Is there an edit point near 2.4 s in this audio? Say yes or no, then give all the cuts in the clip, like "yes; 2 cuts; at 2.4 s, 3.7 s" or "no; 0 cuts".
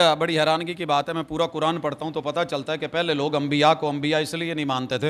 no; 0 cuts